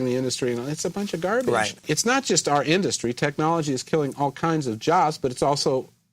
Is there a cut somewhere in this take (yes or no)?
yes